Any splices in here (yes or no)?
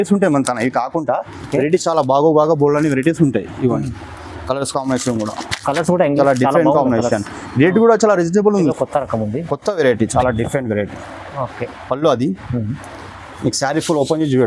yes